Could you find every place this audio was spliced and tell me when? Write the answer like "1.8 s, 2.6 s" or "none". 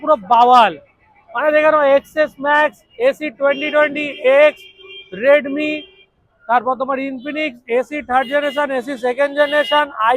none

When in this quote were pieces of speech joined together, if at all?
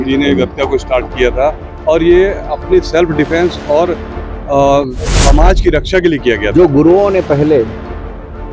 6.5 s

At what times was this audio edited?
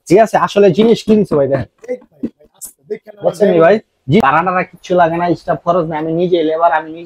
4.2 s

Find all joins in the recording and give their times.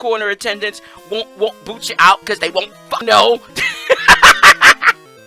3.0 s

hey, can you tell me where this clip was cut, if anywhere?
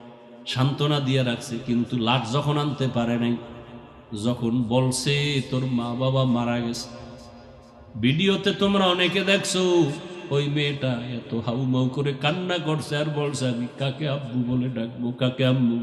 none

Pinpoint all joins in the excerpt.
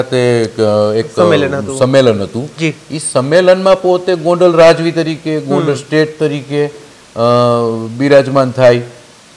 none

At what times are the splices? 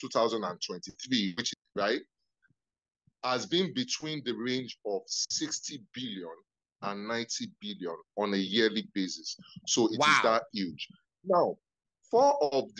1.5 s

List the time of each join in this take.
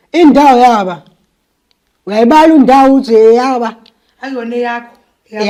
none

